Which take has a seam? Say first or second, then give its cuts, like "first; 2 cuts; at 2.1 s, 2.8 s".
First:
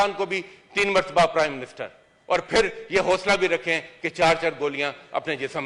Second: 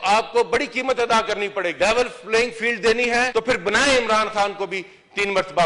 second; 2 cuts; at 1.7 s, 3.3 s